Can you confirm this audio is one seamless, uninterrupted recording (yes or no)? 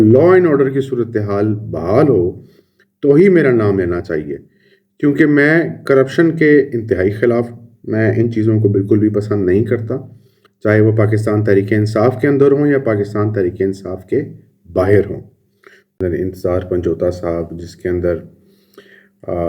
no